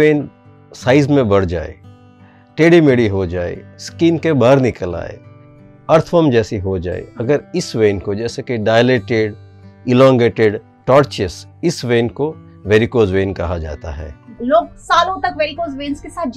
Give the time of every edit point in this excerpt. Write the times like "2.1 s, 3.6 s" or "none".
14.2 s